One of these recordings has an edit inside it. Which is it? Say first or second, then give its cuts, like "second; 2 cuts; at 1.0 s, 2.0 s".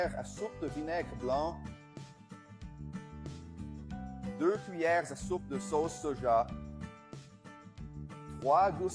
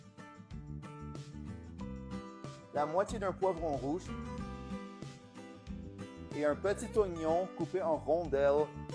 second; 1 cut; at 1.1 s